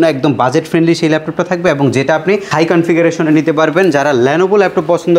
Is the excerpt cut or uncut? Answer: uncut